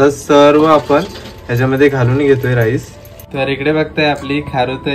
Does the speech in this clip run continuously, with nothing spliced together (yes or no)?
no